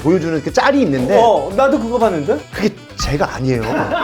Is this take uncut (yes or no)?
no